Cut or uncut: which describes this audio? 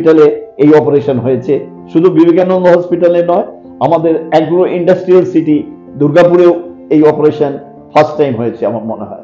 uncut